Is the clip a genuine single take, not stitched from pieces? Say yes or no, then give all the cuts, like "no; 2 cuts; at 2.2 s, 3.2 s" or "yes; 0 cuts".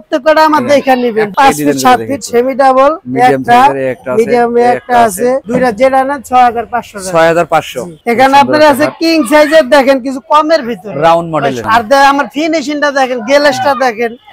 no; 3 cuts; at 1.3 s, 7.9 s, 11.6 s